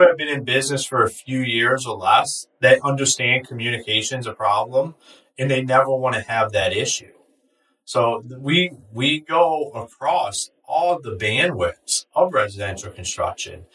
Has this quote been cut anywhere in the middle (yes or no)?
no